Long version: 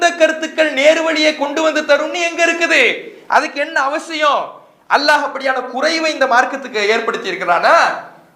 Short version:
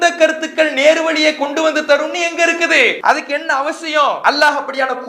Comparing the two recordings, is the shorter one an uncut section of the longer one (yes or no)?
no